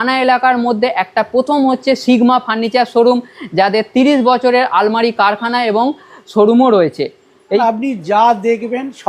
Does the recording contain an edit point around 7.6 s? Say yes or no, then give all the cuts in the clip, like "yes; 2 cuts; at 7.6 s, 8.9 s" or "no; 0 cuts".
yes; 1 cut; at 7.6 s